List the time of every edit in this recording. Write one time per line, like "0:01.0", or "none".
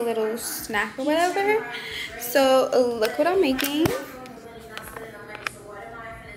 none